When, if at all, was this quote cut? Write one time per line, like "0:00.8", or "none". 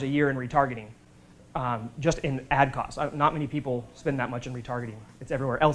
none